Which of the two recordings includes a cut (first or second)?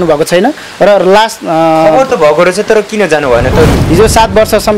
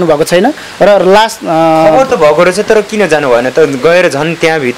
first